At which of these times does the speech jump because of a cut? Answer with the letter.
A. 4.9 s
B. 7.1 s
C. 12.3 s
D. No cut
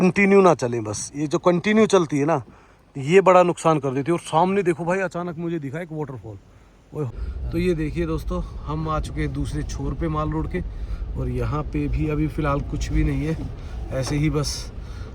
B